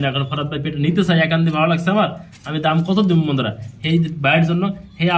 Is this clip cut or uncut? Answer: uncut